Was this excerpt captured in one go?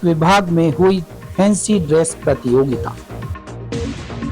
no; 1 cut; at 2.8 s

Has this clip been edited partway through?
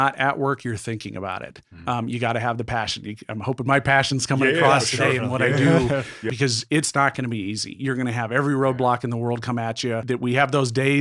yes; 2 cuts; at 6.3 s, 10.0 s

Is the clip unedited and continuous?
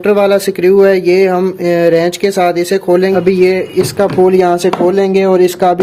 no; 1 cut; at 3.1 s

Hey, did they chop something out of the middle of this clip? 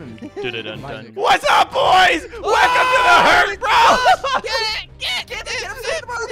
yes; 1 cut; at 1.1 s

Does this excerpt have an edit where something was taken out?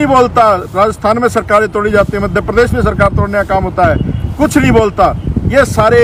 no; 0 cuts

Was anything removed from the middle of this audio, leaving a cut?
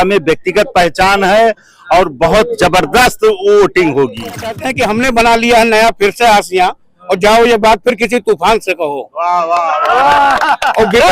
yes; 1 cut; at 4.6 s

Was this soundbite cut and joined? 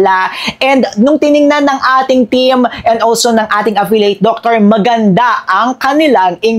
no; 0 cuts

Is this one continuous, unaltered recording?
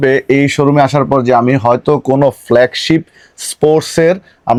yes; 0 cuts

